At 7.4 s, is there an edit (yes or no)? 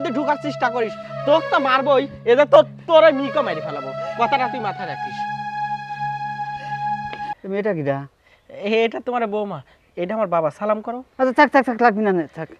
yes